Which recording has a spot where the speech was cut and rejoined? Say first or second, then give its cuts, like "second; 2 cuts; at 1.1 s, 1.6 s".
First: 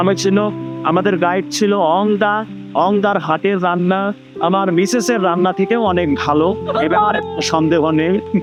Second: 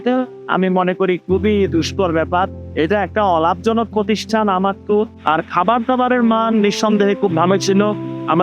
second; 1 cut; at 5.2 s